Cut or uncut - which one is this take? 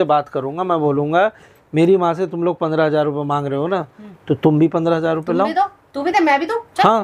uncut